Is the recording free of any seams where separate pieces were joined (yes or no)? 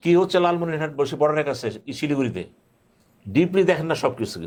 yes